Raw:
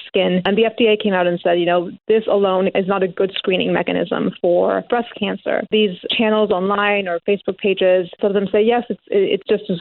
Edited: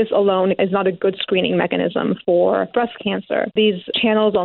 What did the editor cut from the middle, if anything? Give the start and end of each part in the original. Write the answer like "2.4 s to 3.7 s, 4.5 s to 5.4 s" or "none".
none